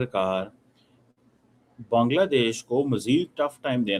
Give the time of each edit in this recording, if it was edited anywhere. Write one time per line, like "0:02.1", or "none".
none

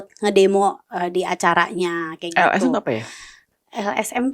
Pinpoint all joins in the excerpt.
none

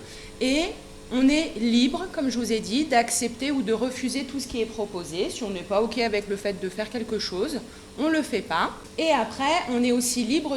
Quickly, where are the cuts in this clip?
0:08.8

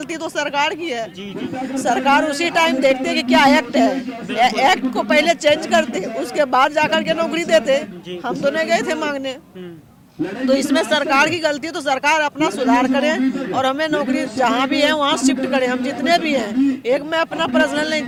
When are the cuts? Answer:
none

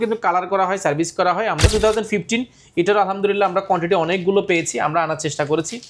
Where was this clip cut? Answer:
0:01.7

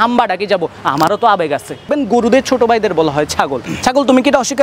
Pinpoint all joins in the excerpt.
0:01.9

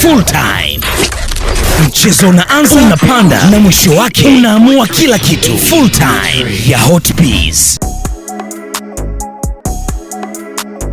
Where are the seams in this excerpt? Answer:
0:07.7
0:09.5

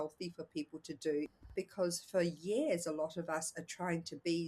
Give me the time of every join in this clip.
0:01.4

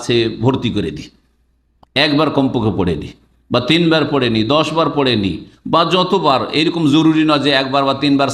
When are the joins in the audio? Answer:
none

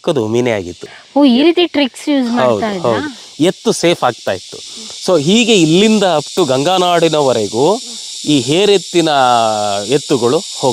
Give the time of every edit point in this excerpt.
none

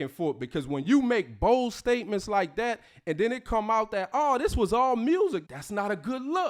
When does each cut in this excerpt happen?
0:05.5

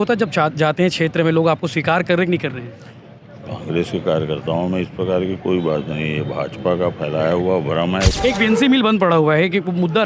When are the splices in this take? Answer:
0:08.1

